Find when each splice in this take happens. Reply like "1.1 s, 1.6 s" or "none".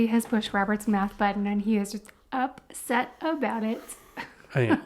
none